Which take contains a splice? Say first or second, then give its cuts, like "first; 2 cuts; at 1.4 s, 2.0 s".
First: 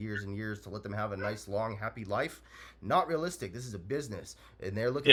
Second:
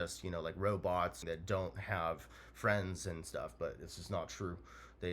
second; 1 cut; at 1.2 s